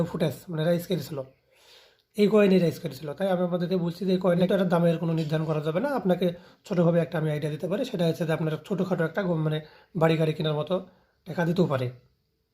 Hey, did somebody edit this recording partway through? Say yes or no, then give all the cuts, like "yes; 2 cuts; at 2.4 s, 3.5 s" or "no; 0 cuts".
yes; 1 cut; at 4.5 s